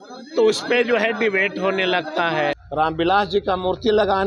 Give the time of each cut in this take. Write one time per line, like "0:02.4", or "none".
0:02.6